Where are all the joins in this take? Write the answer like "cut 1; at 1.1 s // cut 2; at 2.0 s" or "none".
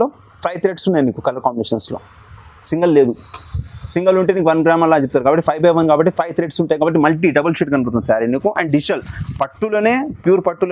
none